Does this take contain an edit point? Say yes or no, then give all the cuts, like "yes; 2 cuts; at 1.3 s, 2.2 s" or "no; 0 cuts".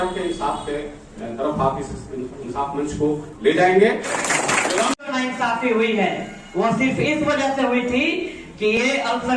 yes; 1 cut; at 5.1 s